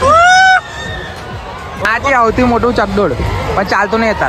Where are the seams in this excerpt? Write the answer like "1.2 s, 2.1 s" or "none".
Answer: 1.7 s